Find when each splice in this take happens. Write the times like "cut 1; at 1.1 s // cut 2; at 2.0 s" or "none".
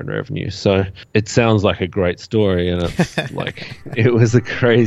cut 1; at 1.0 s